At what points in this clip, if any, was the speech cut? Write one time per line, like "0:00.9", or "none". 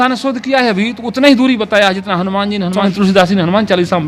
0:02.9